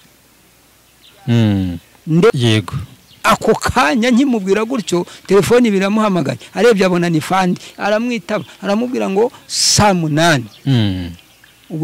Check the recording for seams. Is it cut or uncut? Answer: cut